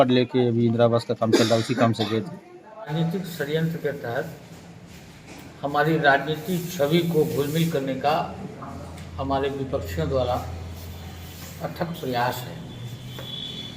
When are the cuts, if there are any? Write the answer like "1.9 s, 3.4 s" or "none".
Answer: 2.9 s